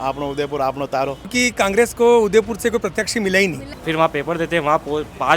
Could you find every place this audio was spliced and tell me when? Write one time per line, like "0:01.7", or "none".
0:01.3
0:03.7